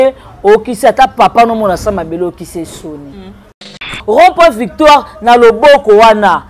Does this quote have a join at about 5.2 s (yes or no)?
no